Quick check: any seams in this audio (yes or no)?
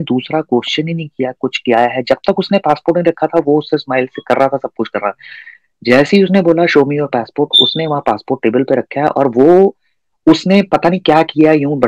no